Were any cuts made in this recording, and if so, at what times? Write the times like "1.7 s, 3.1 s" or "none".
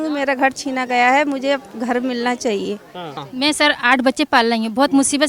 3.2 s